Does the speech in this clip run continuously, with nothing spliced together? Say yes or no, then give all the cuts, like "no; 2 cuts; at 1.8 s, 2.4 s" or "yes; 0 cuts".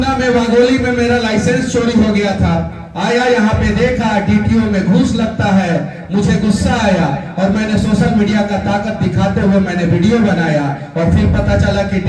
yes; 0 cuts